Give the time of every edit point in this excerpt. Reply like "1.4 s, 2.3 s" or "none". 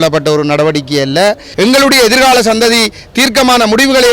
1.5 s